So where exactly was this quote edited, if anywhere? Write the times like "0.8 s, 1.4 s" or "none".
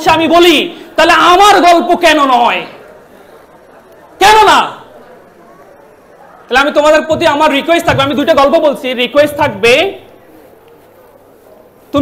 none